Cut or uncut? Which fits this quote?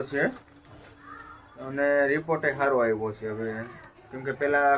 uncut